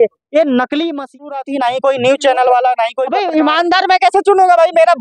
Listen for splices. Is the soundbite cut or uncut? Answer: cut